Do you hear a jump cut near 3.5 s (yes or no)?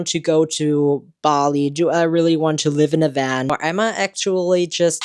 yes